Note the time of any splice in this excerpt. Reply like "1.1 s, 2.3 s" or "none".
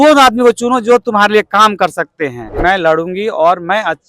2.5 s